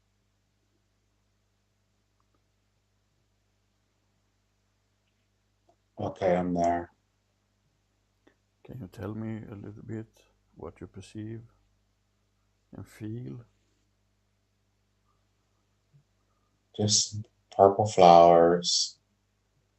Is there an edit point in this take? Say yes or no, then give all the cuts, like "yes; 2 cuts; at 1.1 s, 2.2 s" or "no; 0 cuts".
yes; 1 cut; at 5.5 s